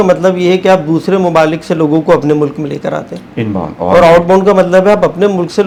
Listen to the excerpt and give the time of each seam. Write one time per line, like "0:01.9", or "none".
none